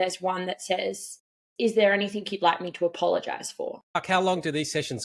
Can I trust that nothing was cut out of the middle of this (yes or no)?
no